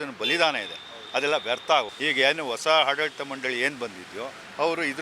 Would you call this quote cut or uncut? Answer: uncut